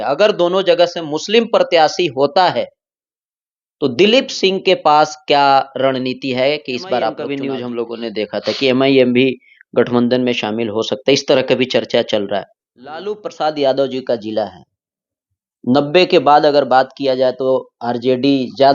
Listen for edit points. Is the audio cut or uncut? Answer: cut